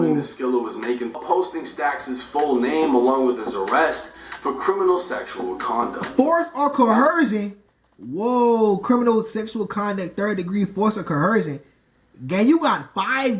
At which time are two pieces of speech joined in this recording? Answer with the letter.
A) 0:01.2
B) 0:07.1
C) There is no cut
A